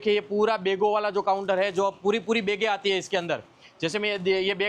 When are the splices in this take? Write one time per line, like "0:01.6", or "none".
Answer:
none